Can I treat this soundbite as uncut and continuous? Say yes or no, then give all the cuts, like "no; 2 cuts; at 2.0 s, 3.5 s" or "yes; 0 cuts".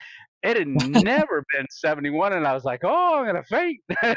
yes; 0 cuts